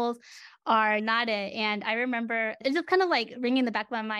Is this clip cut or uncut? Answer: uncut